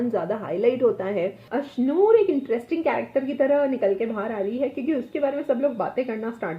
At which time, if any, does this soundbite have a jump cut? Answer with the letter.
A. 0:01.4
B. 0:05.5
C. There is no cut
A